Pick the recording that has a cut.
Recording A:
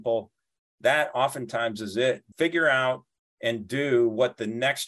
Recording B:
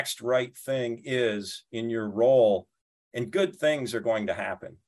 A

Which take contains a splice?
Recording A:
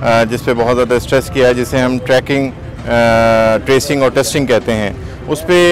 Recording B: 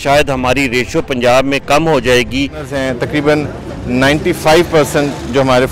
B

